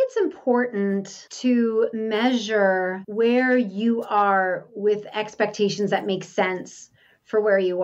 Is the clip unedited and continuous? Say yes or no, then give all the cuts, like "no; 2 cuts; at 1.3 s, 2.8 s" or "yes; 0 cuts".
no; 3 cuts; at 1.2 s, 2.0 s, 3.0 s